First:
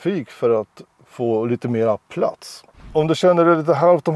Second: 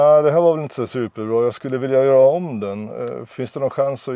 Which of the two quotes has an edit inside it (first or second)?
first